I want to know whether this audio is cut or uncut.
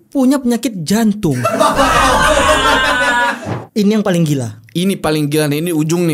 cut